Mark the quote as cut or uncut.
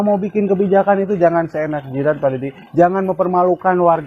uncut